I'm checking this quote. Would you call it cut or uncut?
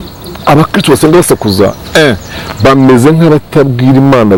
uncut